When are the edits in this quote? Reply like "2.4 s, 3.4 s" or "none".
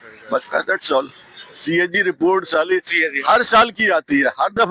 1.5 s